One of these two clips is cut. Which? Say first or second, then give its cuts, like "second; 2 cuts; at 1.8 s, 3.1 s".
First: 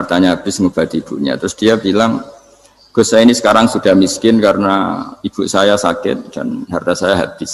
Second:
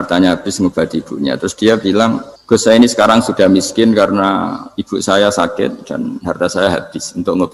second; 1 cut; at 2.3 s